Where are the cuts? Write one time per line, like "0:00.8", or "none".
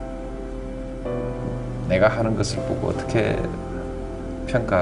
0:01.8